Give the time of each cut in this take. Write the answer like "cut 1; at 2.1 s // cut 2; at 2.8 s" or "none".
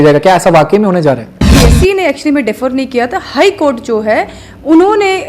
cut 1; at 1.5 s